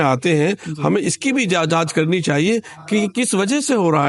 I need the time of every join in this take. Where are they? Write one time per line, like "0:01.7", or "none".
none